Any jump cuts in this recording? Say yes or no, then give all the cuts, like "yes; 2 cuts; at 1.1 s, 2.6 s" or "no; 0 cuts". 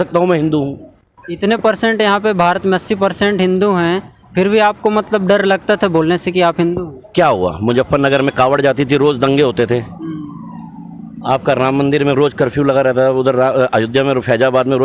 no; 0 cuts